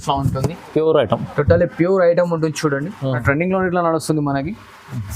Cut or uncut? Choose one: cut